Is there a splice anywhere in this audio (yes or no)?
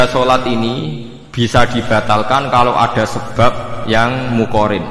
yes